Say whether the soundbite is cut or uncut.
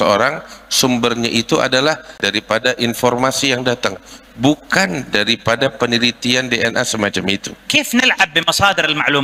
cut